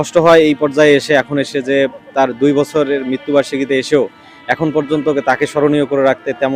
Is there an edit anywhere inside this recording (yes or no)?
no